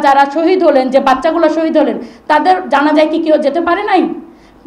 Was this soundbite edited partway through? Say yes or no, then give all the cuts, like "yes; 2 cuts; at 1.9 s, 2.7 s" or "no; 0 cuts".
no; 0 cuts